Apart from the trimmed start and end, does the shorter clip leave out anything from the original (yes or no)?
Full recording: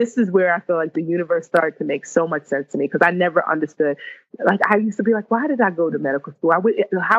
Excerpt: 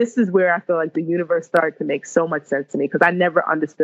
no